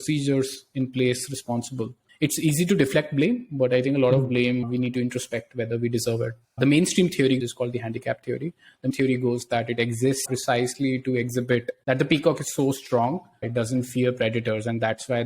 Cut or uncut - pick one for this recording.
cut